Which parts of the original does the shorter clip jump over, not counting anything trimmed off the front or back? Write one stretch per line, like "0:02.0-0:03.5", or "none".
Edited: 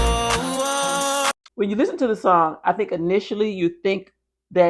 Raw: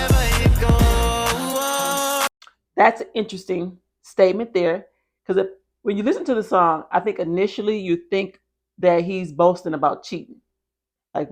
0:02.4-0:05.7